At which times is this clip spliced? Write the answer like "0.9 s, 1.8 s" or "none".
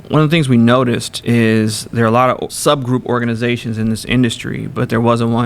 1.1 s, 2.5 s